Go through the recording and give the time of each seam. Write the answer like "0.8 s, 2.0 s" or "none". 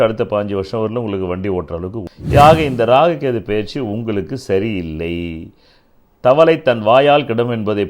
2.1 s

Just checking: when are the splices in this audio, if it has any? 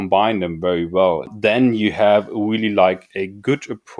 1.3 s

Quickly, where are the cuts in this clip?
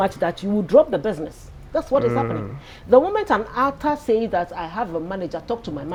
none

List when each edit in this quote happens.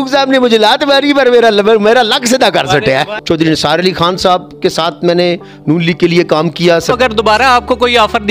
3.1 s, 6.9 s

